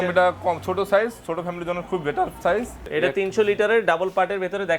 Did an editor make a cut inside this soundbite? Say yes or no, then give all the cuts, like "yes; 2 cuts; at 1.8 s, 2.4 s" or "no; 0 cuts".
yes; 1 cut; at 2.9 s